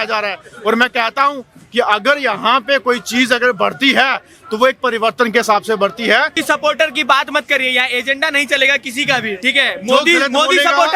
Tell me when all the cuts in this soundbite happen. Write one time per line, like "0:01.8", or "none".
0:06.4

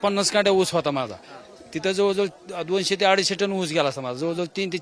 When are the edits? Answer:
none

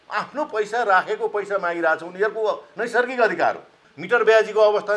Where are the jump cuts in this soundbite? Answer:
0:03.7

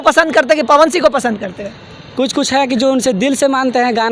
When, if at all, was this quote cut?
none

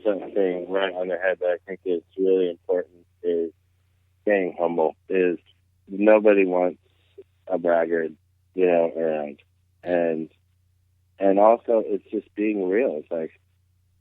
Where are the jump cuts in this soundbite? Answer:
0:05.0

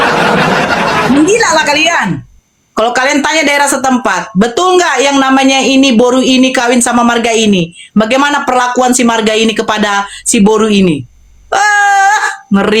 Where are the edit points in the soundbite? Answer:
0:01.1

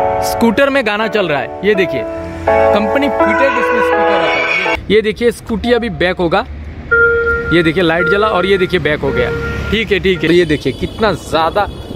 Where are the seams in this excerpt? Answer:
0:04.8
0:10.3

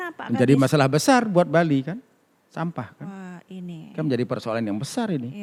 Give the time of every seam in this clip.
none

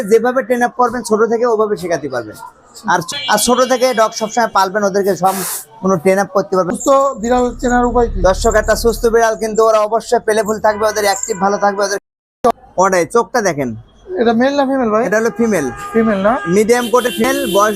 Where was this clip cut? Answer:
0:03.1
0:06.7
0:12.0

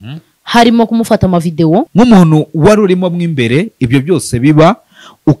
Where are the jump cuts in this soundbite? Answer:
0:01.9

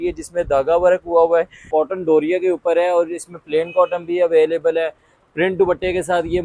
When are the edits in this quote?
0:01.6

